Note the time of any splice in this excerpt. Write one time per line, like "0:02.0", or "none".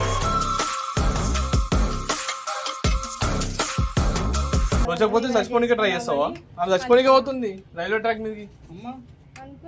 0:04.9